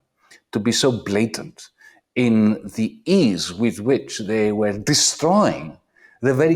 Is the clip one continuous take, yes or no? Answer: yes